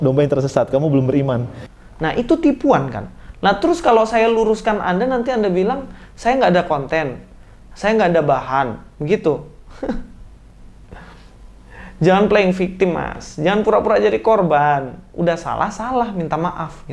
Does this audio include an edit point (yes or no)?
yes